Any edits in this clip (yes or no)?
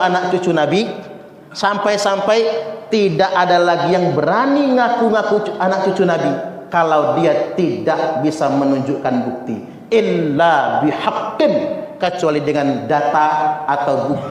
no